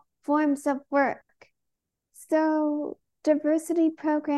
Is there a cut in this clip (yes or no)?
yes